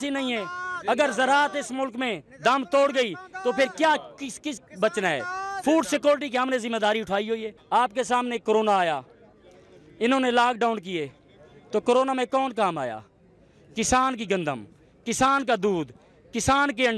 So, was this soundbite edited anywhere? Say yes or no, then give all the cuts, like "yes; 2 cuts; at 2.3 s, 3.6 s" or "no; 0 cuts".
yes; 1 cut; at 7.5 s